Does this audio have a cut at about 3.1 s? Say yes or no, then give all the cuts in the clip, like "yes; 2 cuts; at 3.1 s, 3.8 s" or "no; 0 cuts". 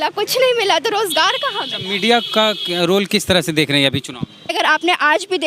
no; 1 cut; at 4.5 s